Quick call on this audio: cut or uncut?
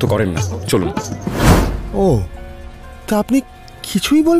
cut